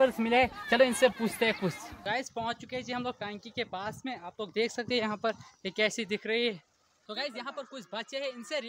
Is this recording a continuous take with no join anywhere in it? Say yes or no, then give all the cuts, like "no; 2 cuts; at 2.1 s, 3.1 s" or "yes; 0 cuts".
no; 2 cuts; at 1.9 s, 6.9 s